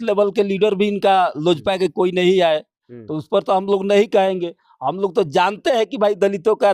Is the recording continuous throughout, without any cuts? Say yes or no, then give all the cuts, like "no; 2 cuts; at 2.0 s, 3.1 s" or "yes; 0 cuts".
yes; 0 cuts